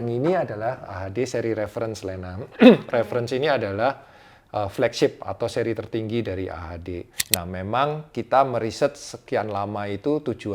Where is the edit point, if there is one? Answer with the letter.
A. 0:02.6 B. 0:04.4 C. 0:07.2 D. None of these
C